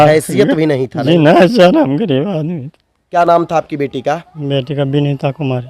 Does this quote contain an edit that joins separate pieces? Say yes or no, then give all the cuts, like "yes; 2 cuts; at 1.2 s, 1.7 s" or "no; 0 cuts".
yes; 1 cut; at 3.0 s